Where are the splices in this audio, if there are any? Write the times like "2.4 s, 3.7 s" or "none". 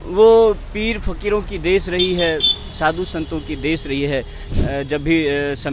4.4 s

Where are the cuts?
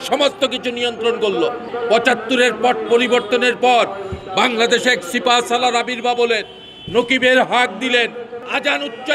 none

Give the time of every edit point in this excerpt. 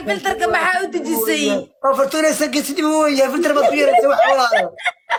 none

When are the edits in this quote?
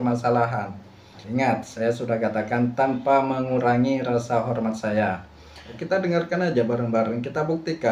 1.2 s, 5.7 s

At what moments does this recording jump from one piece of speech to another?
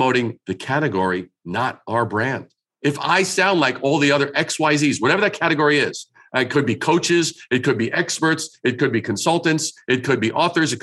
none

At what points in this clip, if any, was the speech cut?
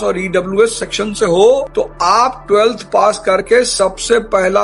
none

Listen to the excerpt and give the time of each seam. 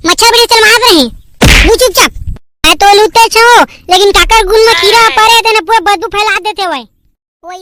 none

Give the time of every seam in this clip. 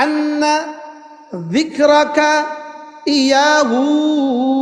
none

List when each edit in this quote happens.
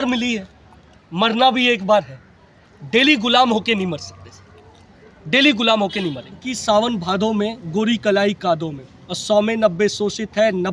6.6 s

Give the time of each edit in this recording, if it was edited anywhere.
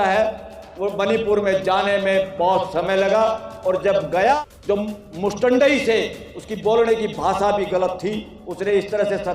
4.4 s

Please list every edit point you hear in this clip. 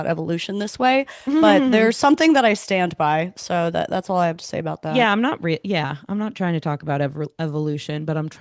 none

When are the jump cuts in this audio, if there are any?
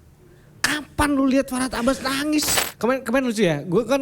2.6 s

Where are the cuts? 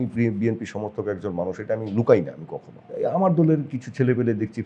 2.8 s

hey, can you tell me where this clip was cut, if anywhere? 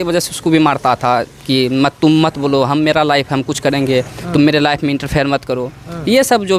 none

